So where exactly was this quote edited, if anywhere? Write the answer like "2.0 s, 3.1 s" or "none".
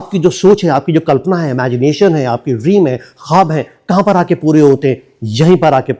none